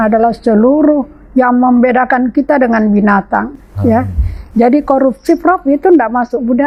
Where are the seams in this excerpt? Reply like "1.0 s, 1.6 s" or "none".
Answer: none